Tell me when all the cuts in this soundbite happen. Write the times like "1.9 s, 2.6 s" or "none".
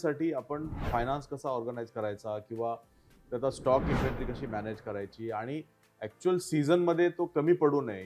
none

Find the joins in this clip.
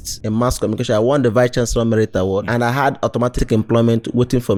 none

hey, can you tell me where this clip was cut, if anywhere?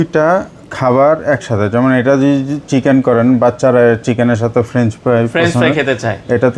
none

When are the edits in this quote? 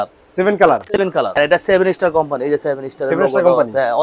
1.3 s

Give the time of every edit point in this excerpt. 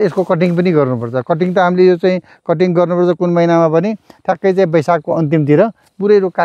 none

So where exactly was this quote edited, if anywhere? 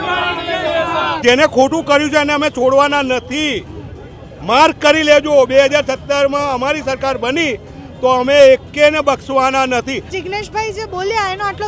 1.2 s, 10.1 s

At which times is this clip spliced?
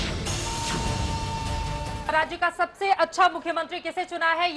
2.1 s

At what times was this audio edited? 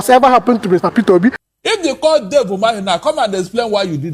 1.4 s

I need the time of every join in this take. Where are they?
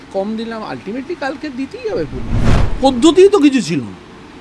2.6 s

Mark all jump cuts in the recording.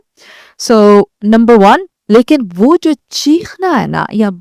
1.9 s

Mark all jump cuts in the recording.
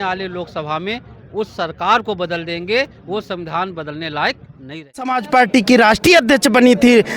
5.2 s

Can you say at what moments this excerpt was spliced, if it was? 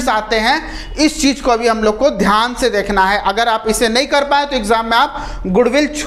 none

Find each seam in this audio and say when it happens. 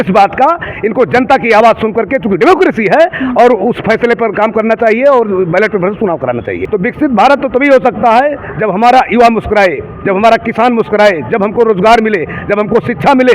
6.6 s

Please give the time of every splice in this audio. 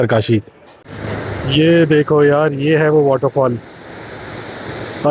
1.0 s

